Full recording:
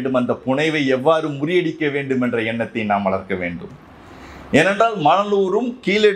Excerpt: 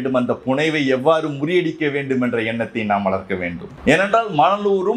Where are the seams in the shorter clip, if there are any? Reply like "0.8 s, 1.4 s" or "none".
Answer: 3.7 s